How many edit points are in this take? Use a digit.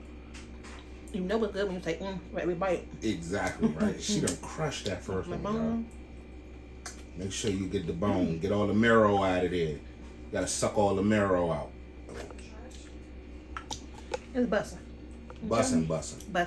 1